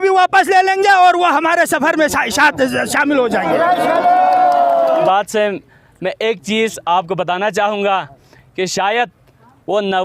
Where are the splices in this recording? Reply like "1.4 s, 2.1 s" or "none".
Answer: 5.1 s